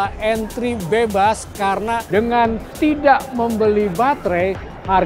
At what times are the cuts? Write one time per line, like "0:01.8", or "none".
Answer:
none